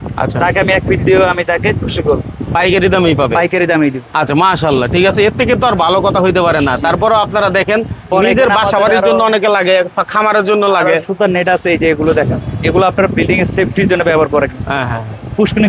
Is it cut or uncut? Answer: uncut